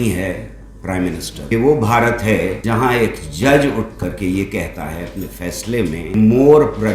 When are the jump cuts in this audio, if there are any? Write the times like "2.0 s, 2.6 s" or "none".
1.5 s, 2.6 s, 6.1 s